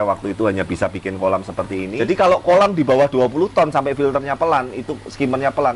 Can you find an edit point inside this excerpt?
yes; 1 cut; at 1.9 s

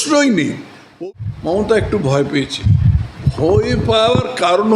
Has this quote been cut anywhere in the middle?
yes; 1 cut; at 0.9 s

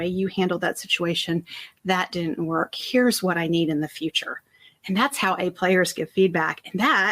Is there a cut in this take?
no; 0 cuts

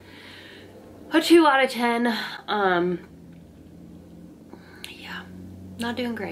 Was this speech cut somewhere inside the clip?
no; 0 cuts

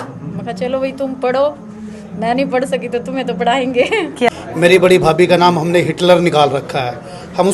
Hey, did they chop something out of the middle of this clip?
yes; 1 cut; at 4.3 s

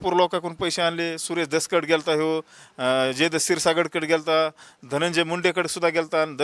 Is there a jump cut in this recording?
no; 0 cuts

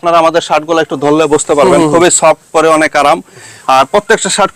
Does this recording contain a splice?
no; 0 cuts

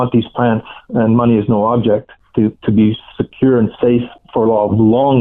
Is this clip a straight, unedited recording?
no; 2 cuts; at 2.2 s, 4.2 s

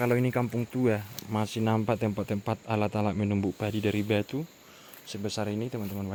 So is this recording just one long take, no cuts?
yes; 0 cuts

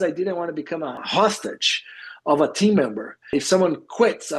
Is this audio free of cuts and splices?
no; 2 cuts; at 1.0 s, 3.3 s

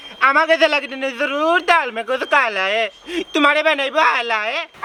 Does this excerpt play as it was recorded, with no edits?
yes; 0 cuts

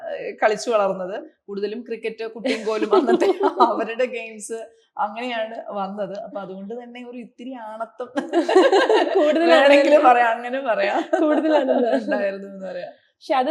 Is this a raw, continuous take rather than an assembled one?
yes; 0 cuts

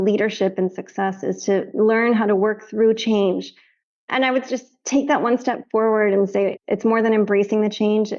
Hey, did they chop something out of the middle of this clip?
no; 0 cuts

